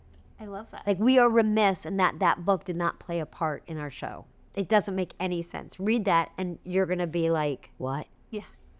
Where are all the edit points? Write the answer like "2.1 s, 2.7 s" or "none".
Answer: none